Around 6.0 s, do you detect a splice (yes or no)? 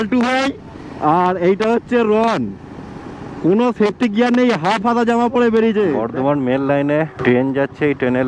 yes